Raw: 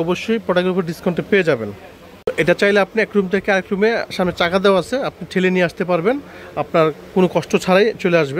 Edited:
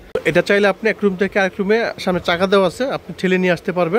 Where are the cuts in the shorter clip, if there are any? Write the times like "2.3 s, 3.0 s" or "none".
none